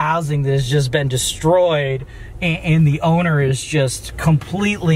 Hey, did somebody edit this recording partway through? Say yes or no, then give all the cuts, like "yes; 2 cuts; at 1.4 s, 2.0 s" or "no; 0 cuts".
no; 0 cuts